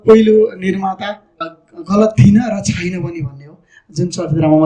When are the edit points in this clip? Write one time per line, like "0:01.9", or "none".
0:01.4